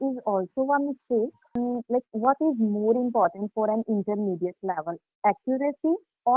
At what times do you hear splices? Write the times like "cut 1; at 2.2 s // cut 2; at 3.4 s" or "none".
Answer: cut 1; at 1.6 s